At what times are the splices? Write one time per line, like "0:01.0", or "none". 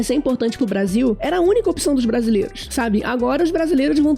0:01.2
0:02.6